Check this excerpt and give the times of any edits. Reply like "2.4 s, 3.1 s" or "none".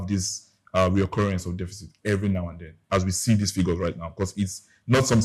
2.8 s